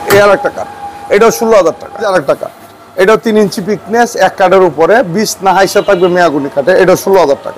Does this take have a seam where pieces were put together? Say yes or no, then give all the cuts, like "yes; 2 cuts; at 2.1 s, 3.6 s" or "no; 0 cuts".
yes; 1 cut; at 2.1 s